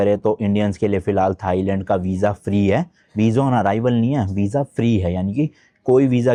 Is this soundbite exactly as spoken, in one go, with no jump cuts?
yes; 0 cuts

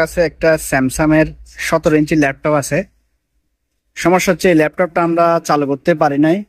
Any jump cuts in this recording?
no; 0 cuts

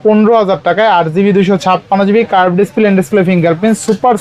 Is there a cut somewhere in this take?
no; 0 cuts

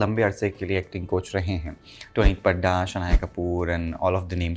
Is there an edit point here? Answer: no; 0 cuts

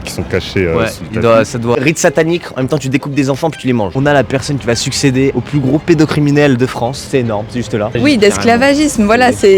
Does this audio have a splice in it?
yes; 4 cuts; at 1.7 s, 3.9 s, 5.3 s, 8.0 s

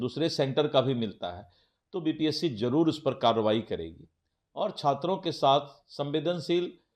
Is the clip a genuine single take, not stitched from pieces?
yes; 0 cuts

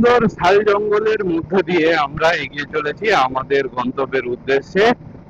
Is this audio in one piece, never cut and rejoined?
yes; 0 cuts

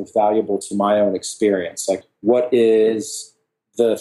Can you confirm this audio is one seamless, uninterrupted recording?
no; 1 cut; at 2.0 s

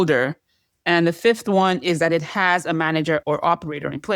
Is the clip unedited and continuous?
no; 1 cut; at 3.2 s

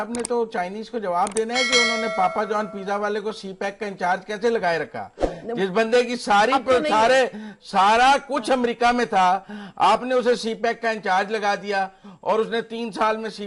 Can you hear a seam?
no; 0 cuts

